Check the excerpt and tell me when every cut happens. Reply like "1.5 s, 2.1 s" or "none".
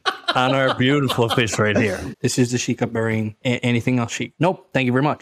2.1 s